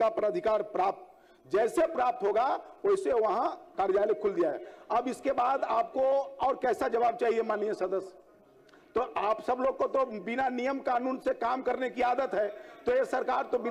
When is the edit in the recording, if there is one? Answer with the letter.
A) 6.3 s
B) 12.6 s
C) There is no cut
C